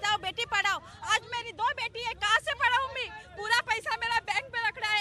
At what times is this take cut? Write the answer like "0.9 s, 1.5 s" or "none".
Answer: none